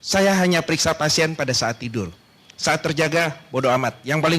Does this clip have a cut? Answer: no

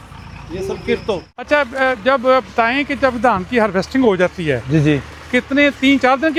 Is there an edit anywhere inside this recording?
no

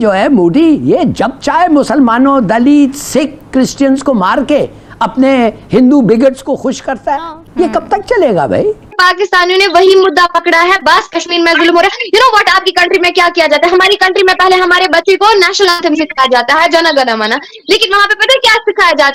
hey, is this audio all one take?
yes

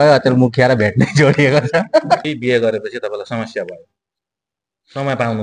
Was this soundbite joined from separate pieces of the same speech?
yes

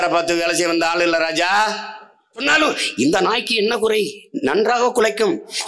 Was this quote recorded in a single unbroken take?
no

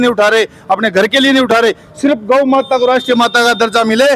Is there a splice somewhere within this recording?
no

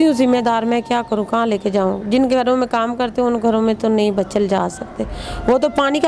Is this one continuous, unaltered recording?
yes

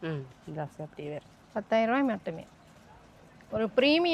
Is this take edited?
no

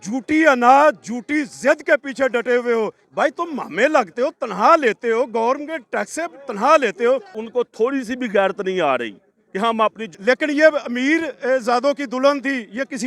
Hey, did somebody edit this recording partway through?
yes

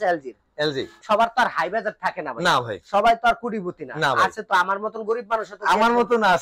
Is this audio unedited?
no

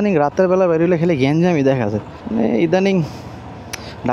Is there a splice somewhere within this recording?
yes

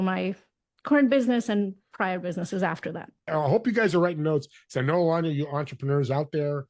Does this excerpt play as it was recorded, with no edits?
no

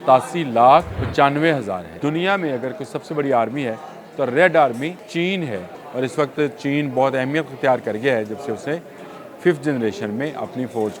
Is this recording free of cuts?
no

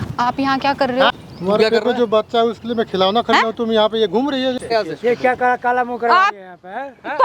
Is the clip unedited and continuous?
no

